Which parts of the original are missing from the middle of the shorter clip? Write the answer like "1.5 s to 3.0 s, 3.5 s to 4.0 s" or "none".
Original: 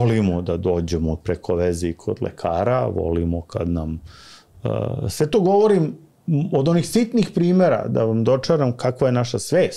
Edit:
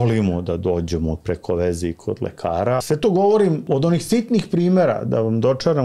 2.8 s to 5.1 s, 5.9 s to 6.5 s